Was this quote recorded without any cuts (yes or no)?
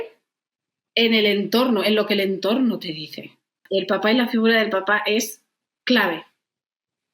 no